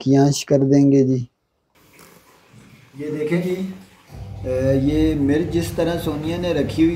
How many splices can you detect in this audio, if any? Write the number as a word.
one